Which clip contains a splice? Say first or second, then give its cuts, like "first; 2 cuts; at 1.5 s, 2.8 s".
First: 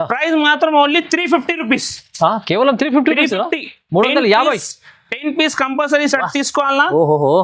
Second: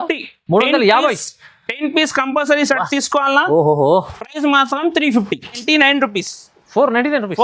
second; 1 cut; at 5.6 s